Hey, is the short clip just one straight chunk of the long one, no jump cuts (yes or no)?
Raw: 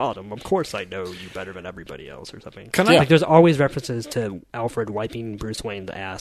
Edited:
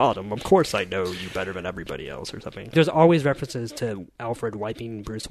no